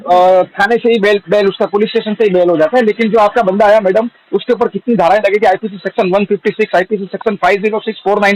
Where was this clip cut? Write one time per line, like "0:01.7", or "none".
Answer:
none